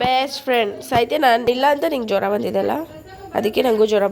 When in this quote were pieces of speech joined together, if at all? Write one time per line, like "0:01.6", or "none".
0:01.4